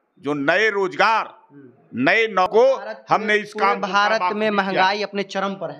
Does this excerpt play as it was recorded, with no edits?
no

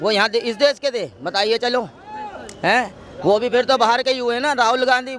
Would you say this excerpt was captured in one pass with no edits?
yes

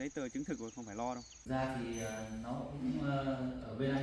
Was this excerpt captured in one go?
no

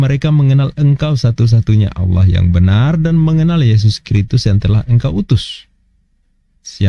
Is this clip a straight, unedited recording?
yes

